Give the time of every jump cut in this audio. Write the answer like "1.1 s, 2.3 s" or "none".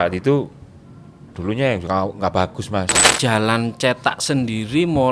3.1 s